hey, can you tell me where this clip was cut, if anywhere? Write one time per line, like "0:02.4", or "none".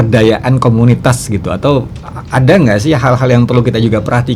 none